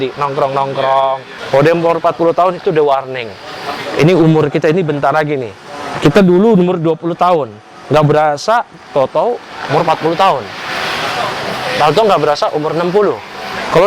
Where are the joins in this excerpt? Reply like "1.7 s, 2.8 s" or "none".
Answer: 1.3 s